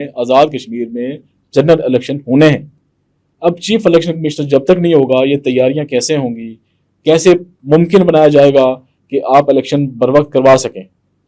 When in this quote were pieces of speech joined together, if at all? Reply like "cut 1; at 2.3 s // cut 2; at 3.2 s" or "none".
none